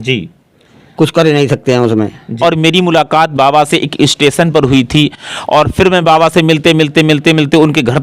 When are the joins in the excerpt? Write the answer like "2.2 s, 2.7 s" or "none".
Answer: 2.3 s

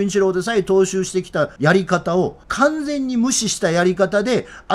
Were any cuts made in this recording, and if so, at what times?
1.5 s, 2.4 s

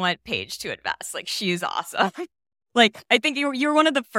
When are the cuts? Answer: none

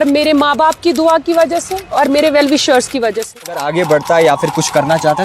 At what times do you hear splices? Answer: 3.6 s

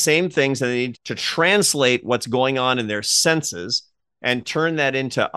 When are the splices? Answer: 0.9 s

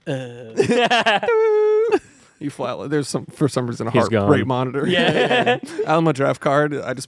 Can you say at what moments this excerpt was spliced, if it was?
none

